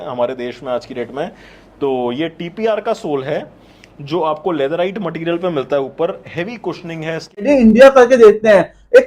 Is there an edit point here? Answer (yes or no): yes